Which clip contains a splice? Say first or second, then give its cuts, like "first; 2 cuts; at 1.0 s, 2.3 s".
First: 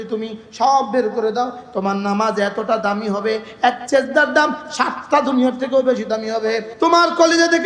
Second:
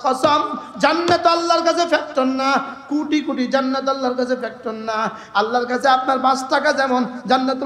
first; 1 cut; at 6.7 s